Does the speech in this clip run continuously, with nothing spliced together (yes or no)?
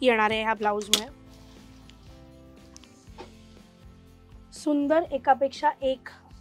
yes